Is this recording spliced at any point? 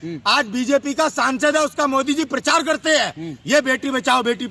no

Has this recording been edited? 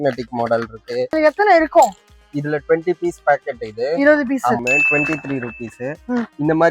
yes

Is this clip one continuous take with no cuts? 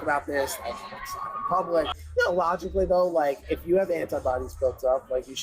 yes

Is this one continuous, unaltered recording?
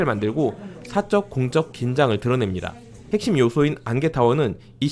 no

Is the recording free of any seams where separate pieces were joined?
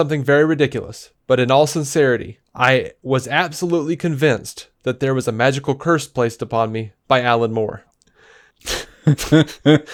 yes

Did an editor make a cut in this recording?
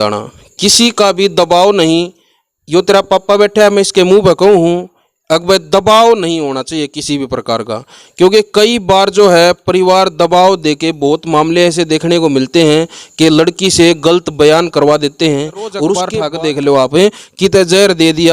yes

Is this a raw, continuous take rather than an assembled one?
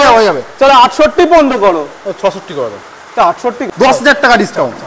no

